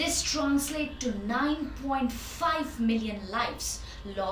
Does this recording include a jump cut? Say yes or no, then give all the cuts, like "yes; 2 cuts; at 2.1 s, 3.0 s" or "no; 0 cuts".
no; 0 cuts